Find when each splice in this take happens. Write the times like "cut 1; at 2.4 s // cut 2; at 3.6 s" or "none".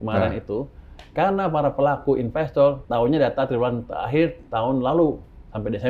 cut 1; at 2.8 s